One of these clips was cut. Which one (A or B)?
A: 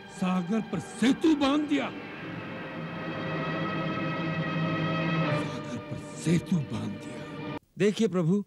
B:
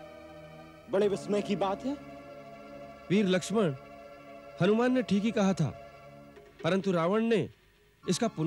A